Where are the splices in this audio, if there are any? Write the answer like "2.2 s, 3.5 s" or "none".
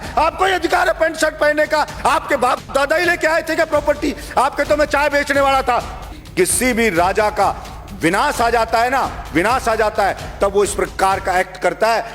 6.2 s